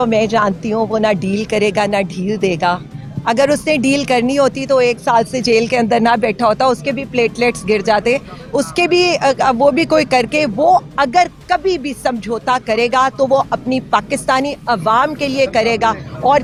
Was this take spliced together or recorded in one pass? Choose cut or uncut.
uncut